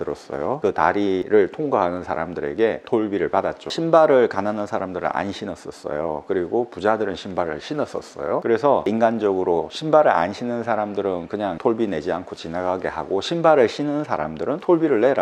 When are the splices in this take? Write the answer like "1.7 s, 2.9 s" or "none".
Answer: 3.7 s